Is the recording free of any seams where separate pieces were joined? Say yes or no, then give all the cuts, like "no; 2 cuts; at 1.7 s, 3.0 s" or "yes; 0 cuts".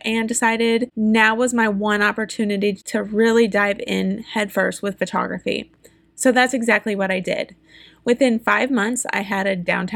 no; 2 cuts; at 0.9 s, 2.8 s